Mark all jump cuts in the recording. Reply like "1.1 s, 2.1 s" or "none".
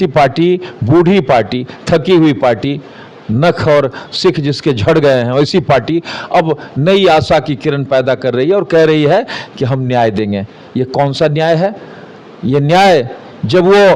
none